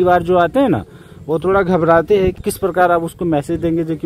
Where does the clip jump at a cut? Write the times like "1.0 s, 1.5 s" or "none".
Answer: 2.4 s